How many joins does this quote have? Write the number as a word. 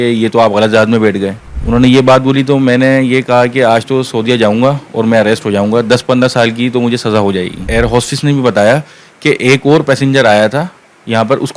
two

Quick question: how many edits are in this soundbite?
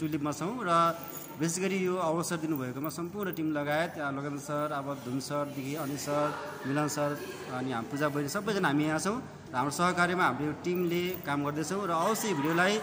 zero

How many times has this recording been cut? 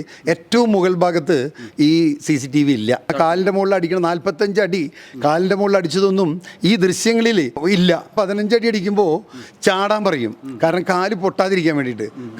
two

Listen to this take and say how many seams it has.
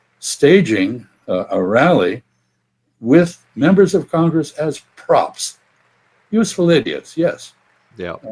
zero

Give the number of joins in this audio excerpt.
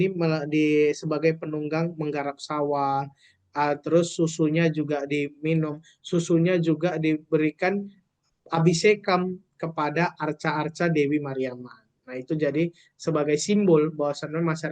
zero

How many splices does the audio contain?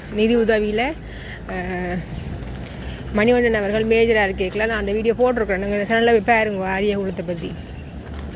zero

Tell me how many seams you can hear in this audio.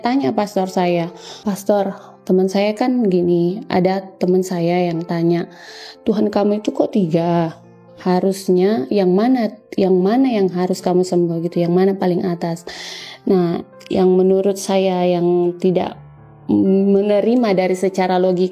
one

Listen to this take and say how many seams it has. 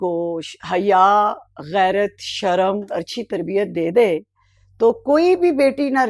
one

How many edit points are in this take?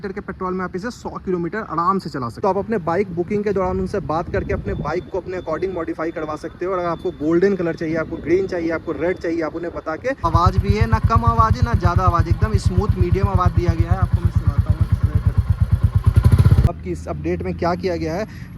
three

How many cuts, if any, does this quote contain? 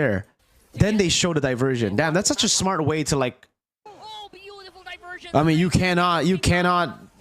one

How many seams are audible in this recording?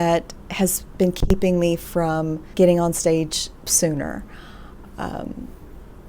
one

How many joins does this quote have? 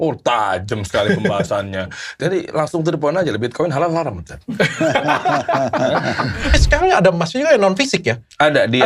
two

